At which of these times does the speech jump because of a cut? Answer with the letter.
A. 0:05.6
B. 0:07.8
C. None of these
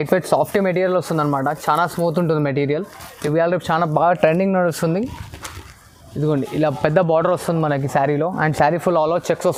C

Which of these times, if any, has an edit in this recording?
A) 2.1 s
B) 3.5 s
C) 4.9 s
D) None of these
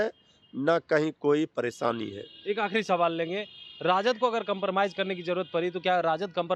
D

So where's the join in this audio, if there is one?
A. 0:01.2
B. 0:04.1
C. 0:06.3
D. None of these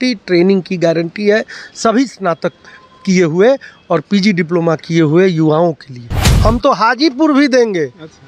C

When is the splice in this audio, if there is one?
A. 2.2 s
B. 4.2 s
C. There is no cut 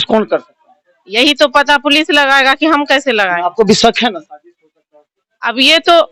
C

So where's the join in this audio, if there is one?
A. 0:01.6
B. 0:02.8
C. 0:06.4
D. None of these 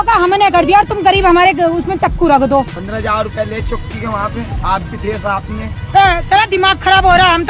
B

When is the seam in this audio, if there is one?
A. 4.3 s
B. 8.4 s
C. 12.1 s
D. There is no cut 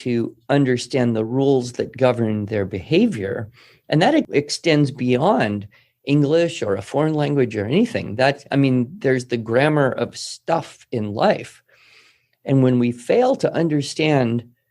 A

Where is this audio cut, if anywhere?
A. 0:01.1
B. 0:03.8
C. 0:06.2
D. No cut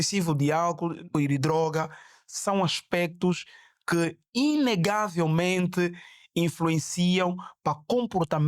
A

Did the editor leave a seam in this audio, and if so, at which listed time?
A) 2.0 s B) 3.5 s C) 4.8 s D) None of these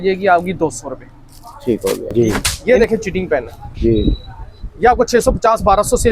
A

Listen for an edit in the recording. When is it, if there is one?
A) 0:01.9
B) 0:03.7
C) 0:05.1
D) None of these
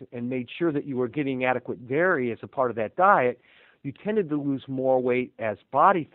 D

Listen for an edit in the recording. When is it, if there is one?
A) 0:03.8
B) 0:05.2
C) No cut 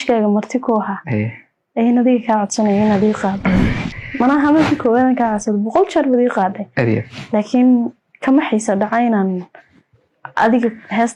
A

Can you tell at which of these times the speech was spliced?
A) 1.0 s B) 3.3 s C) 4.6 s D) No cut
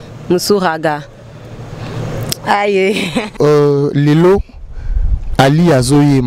B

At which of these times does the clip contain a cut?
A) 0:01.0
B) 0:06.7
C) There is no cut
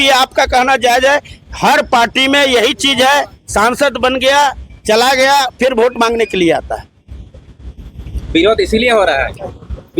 C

